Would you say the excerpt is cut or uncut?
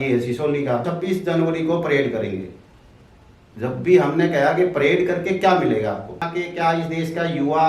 cut